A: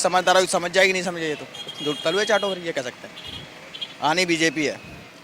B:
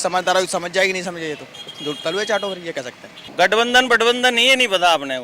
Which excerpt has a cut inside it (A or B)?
B